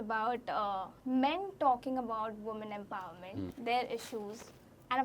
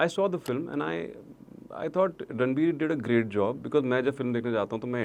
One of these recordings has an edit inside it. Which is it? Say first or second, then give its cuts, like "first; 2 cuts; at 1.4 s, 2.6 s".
first; 2 cuts; at 0.9 s, 3.5 s